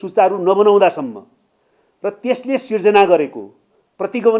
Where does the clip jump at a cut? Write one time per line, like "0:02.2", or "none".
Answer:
none